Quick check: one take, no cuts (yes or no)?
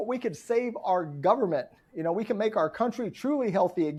yes